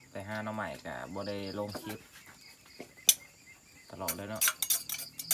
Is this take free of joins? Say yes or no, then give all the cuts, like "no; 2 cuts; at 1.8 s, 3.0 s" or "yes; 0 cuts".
yes; 0 cuts